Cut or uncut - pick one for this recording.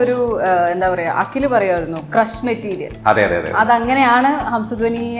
uncut